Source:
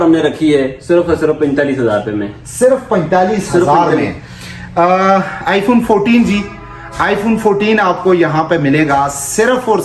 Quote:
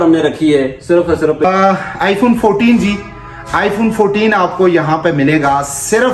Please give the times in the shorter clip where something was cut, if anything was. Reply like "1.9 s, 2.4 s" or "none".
1.4 s